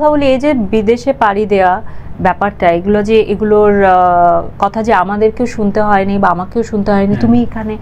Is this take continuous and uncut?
yes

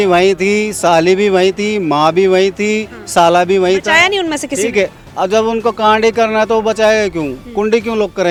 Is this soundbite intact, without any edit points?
yes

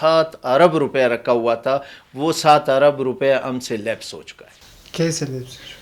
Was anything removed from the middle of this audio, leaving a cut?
no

